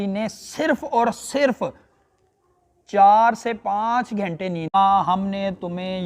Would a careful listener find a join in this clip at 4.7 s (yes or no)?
yes